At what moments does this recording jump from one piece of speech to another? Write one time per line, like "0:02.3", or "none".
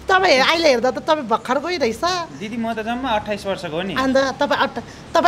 none